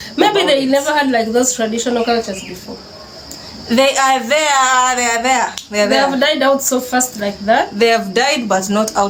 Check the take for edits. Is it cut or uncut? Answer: uncut